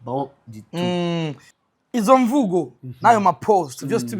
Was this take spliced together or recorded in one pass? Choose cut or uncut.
cut